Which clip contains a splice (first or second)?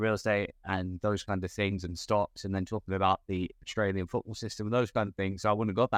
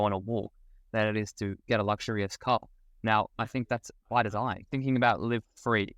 second